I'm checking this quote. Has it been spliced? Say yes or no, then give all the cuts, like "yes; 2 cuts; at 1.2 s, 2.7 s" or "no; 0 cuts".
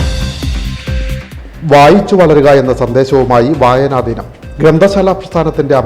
yes; 1 cut; at 1.0 s